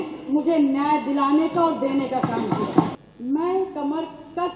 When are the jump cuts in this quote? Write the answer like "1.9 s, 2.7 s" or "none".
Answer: 2.9 s